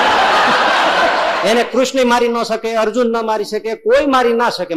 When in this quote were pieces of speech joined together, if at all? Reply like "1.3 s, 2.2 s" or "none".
1.4 s